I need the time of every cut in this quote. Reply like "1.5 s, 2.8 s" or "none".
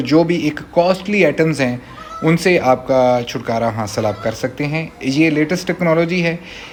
none